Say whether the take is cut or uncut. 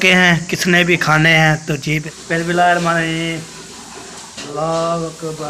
cut